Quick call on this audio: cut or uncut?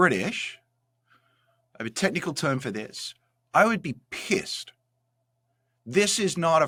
uncut